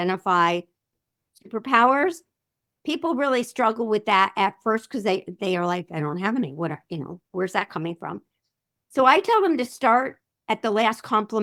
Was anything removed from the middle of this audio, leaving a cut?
no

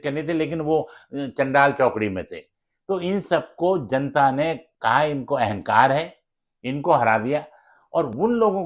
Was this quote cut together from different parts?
no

